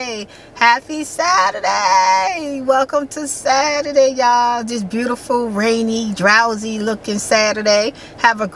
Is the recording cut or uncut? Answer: uncut